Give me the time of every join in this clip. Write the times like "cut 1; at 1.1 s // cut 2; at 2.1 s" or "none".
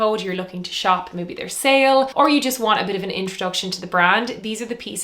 cut 1; at 2.1 s